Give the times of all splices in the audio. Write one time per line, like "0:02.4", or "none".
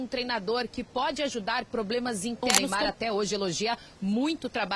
0:02.7